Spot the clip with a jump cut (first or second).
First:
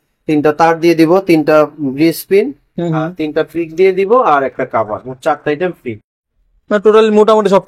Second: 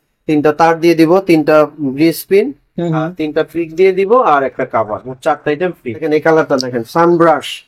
second